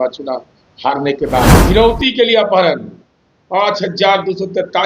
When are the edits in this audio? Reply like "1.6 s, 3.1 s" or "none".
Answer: 1.6 s